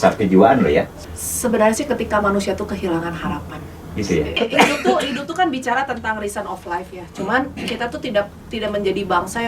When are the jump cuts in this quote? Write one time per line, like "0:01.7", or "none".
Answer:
0:01.0
0:04.4